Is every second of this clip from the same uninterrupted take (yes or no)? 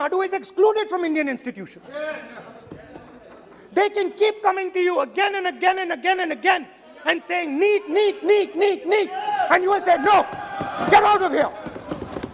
yes